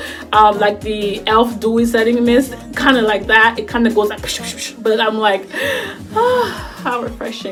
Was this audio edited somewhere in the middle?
no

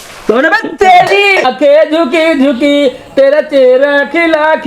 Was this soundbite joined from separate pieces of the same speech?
yes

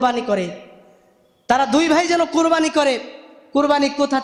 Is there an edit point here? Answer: no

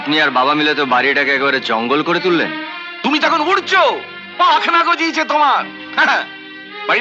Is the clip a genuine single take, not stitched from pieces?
yes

